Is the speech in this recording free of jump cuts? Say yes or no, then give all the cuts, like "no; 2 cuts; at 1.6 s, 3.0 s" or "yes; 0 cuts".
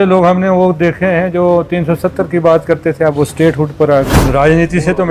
no; 1 cut; at 4.2 s